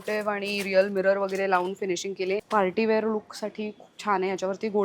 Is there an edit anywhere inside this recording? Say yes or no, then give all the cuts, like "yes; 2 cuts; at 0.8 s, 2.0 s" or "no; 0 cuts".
yes; 1 cut; at 2.4 s